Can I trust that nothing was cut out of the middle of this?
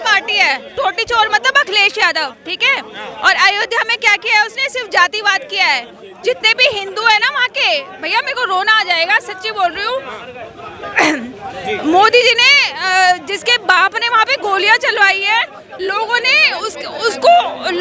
yes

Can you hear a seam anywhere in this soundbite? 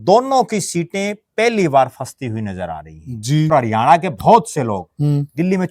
yes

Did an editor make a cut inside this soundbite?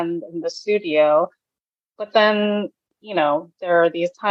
no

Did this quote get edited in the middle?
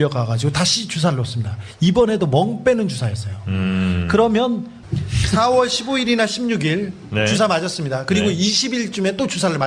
yes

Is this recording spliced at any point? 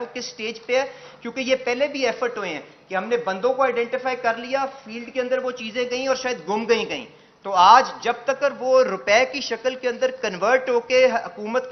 no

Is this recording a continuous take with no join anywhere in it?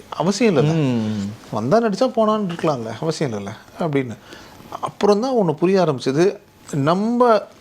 yes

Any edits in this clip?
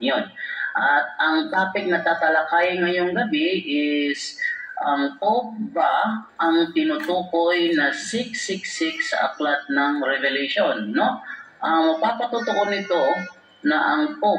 yes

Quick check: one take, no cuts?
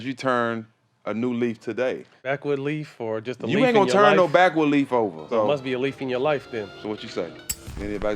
no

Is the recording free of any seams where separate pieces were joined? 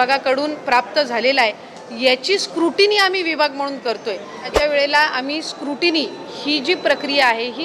no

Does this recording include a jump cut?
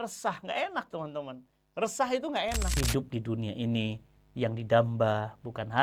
yes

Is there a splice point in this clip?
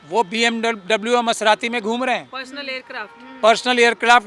no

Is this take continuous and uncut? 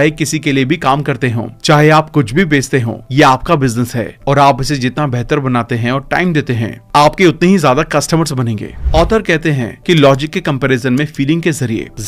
no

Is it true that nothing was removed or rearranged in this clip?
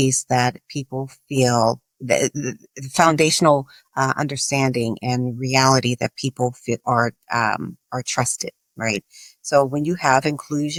yes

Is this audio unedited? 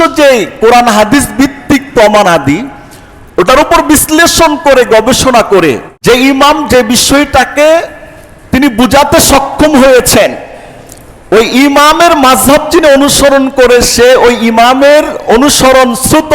no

